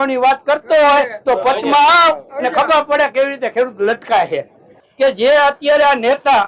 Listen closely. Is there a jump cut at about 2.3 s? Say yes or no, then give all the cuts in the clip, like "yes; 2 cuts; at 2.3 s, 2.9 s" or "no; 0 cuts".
no; 1 cut; at 4.8 s